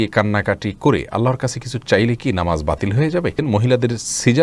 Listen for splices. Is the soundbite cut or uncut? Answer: cut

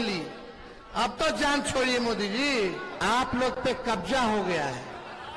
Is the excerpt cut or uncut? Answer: cut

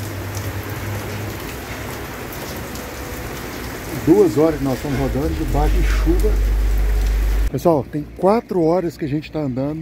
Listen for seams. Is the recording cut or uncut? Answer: cut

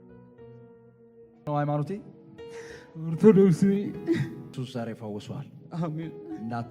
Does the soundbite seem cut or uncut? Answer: cut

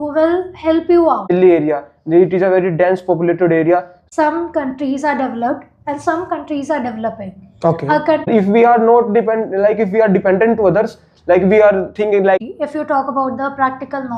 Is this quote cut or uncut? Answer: cut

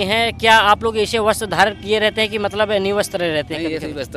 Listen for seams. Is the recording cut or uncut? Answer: uncut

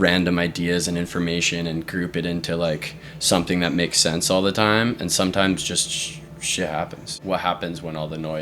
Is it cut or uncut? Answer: cut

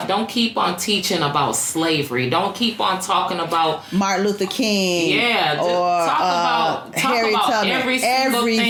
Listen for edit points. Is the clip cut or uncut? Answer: uncut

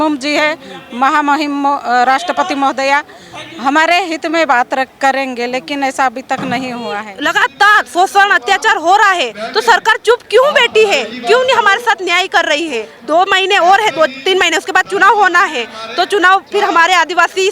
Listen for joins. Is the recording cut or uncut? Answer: cut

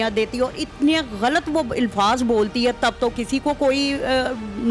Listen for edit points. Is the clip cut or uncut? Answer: uncut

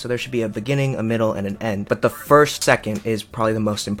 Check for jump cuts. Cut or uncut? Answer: cut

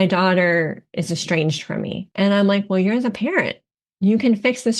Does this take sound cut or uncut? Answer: cut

